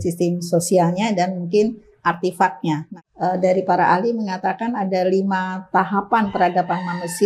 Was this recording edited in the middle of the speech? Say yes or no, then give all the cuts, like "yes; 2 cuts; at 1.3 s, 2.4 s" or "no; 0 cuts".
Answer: yes; 1 cut; at 2.9 s